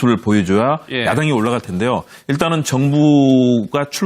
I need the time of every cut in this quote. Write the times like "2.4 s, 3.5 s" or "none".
1.8 s